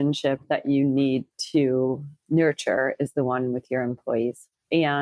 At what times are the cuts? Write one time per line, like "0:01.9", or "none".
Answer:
0:02.1